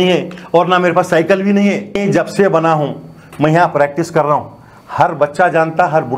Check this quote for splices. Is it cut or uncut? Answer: cut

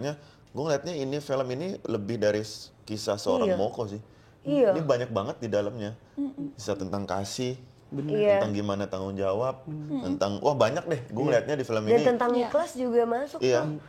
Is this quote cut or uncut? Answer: uncut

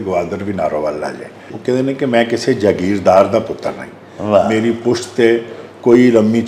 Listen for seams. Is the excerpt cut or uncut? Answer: cut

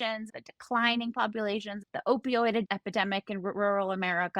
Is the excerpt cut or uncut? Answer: cut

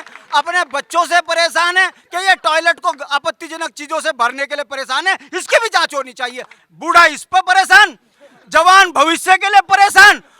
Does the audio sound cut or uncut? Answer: cut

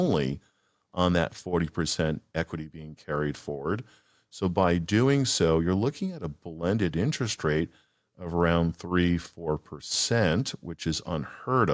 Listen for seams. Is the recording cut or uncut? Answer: uncut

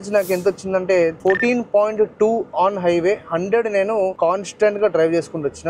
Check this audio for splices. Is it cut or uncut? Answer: uncut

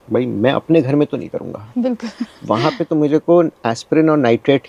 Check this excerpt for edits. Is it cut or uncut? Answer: uncut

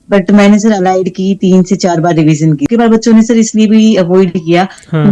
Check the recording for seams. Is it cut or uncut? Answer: cut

